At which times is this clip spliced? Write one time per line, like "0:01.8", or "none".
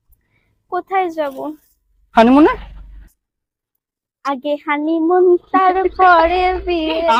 none